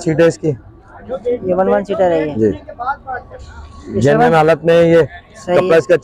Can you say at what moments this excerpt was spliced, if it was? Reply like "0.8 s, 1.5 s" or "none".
none